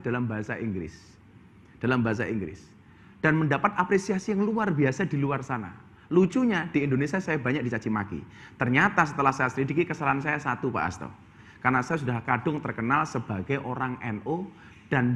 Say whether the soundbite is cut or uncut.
uncut